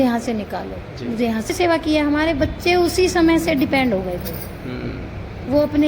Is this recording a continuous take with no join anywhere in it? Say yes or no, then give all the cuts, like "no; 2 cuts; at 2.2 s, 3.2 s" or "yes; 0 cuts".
no; 1 cut; at 1.5 s